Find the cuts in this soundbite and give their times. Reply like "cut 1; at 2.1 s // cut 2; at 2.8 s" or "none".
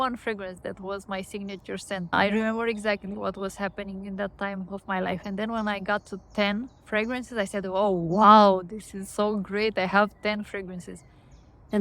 cut 1; at 2.1 s